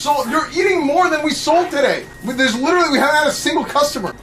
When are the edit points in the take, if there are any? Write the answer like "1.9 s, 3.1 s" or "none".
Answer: none